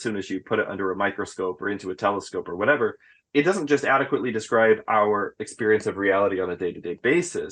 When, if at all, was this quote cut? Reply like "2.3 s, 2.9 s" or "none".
3.1 s